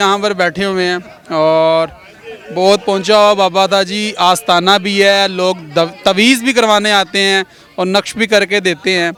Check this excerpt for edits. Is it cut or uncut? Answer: uncut